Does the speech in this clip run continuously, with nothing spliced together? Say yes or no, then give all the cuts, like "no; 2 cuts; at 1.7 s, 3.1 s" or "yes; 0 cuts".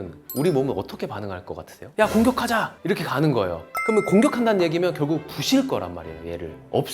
no; 2 cuts; at 1.9 s, 3.7 s